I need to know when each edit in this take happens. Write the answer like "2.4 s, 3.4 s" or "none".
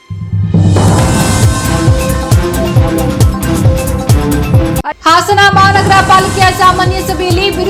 5.0 s